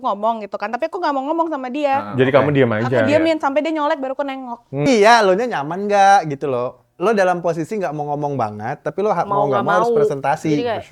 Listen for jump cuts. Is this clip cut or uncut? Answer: cut